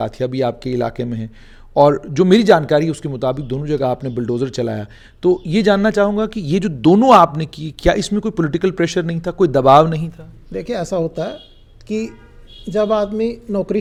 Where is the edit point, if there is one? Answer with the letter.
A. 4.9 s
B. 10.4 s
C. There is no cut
C